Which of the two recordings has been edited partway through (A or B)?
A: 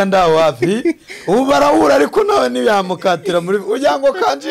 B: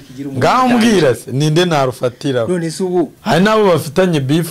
B